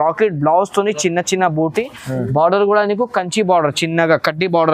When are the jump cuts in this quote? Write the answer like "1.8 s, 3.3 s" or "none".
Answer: none